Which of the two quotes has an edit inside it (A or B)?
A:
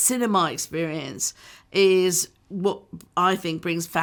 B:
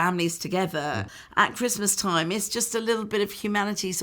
B